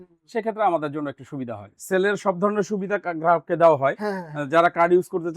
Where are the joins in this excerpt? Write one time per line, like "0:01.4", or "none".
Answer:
0:01.8